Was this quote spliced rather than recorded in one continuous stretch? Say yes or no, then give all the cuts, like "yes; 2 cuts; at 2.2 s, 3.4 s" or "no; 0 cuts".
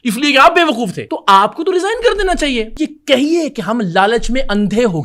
yes; 2 cuts; at 1.1 s, 2.7 s